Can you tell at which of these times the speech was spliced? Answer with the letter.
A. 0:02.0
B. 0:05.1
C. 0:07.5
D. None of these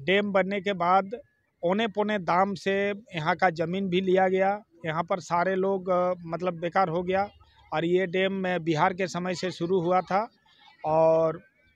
D